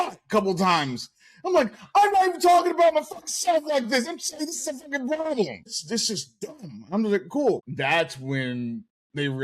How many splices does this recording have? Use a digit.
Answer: 2